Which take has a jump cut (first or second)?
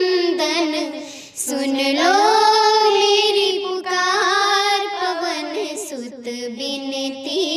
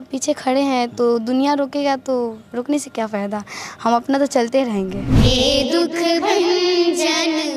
second